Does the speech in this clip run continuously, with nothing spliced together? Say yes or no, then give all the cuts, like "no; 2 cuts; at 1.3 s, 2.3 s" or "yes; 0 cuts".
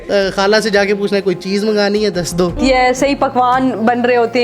no; 1 cut; at 2.6 s